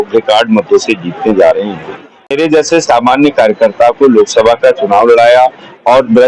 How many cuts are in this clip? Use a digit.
1